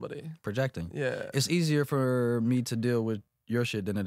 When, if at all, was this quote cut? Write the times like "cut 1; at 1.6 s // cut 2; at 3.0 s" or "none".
none